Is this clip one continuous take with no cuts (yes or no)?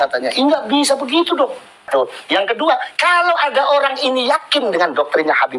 no